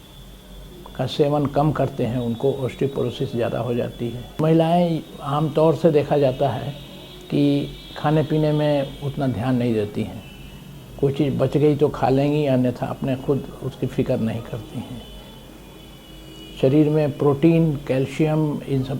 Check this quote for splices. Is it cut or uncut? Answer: cut